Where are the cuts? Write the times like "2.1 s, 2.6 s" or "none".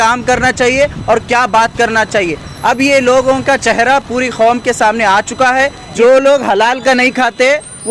5.9 s

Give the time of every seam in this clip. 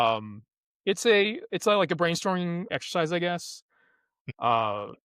2.8 s

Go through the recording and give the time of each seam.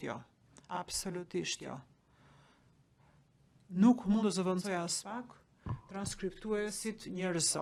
none

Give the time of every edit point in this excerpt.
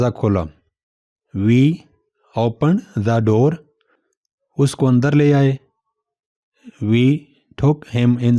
5.9 s

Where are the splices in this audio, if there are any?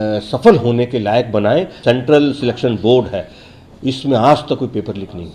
1.7 s

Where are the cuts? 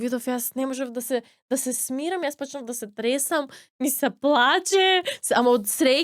none

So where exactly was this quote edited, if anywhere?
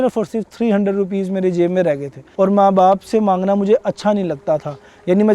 2.2 s

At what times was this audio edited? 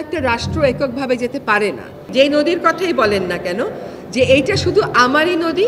2.1 s

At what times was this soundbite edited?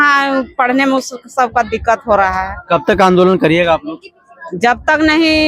none

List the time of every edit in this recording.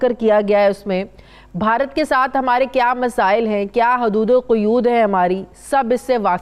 none

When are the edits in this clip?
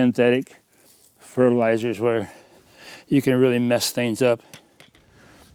none

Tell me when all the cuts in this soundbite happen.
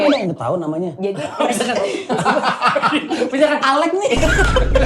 3.3 s

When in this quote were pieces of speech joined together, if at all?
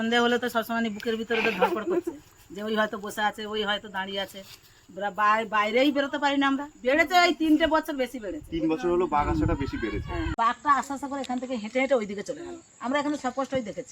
6.7 s, 10.3 s

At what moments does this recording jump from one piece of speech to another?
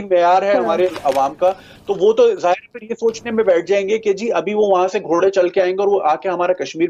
none

